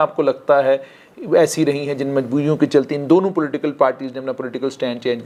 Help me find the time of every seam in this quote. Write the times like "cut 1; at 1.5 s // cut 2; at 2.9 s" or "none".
none